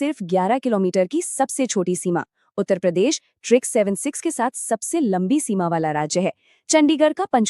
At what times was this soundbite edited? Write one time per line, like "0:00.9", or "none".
none